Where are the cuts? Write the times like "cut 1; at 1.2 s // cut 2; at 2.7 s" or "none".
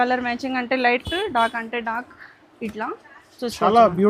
none